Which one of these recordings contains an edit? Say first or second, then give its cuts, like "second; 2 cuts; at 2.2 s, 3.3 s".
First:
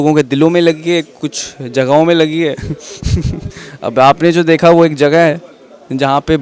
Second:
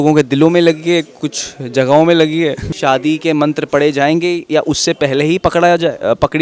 second; 1 cut; at 2.7 s